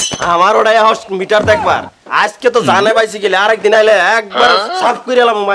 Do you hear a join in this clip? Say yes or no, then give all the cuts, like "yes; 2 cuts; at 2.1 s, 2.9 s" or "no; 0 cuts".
no; 0 cuts